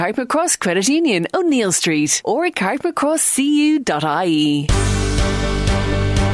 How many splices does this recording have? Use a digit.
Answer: 1